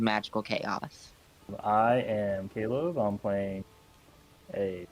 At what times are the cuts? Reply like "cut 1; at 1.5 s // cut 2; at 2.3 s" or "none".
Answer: cut 1; at 1.5 s

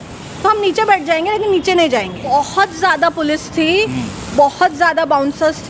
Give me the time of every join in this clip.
cut 1; at 2.3 s

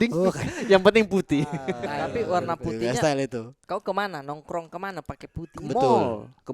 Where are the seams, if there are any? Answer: cut 1; at 1.8 s

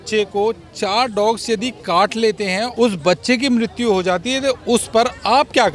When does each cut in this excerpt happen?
cut 1; at 2.7 s

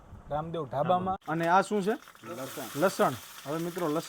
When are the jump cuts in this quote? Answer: cut 1; at 1.2 s

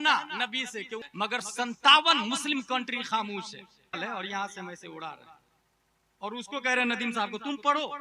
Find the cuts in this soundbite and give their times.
cut 1; at 1.0 s // cut 2; at 4.0 s

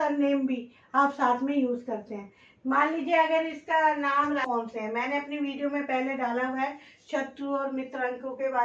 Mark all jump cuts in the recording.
cut 1; at 4.4 s

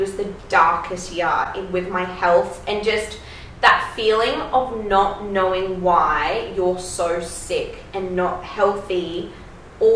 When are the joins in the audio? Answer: none

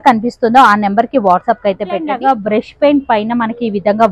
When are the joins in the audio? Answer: cut 1; at 2.1 s

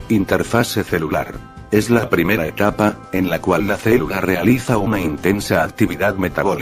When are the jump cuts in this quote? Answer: cut 1; at 2.8 s

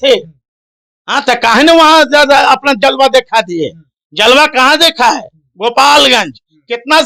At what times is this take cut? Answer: none

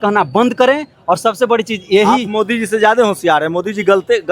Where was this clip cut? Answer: none

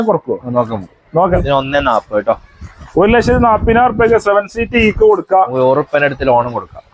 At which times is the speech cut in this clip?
cut 1; at 1.3 s

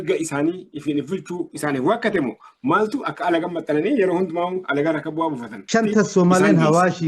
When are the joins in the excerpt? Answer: cut 1; at 5.5 s

